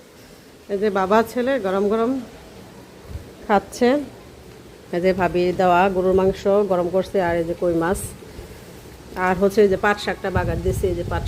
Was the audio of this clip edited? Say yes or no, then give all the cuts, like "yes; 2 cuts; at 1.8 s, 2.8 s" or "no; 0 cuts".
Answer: no; 0 cuts